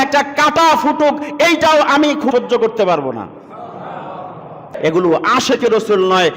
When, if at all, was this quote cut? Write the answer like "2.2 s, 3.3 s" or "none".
2.3 s, 4.8 s